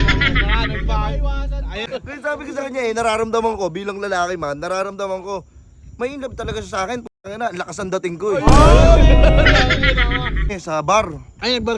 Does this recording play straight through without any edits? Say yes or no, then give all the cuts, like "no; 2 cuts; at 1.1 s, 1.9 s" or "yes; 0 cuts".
no; 2 cuts; at 1.9 s, 10.5 s